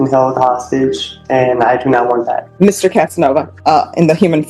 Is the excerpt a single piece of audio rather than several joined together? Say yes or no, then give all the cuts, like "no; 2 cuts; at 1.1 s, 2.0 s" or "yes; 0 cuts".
no; 2 cuts; at 2.4 s, 3.5 s